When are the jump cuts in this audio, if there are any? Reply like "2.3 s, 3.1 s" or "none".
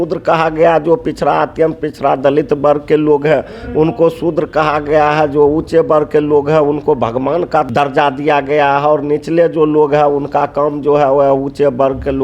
7.7 s